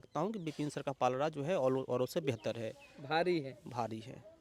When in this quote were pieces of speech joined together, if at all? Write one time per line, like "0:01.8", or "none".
none